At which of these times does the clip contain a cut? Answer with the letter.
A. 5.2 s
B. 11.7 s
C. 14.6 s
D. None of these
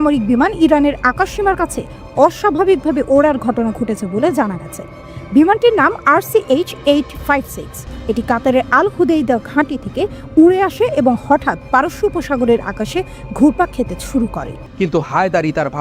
C